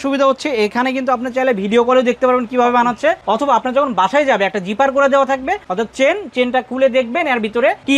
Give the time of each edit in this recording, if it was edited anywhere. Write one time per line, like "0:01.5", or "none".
0:03.2
0:05.7